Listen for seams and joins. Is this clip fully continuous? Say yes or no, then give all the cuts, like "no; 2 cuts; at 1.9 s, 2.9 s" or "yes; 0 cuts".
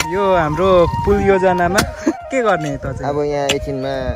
no; 1 cut; at 2.2 s